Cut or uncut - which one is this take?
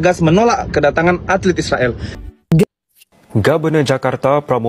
cut